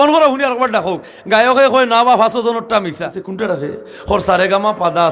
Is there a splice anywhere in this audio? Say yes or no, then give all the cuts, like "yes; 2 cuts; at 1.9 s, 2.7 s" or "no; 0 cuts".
yes; 1 cut; at 3.1 s